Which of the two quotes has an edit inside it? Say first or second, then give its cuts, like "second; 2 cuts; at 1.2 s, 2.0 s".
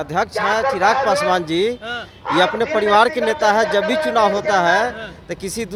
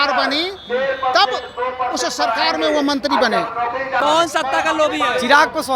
second; 1 cut; at 4.0 s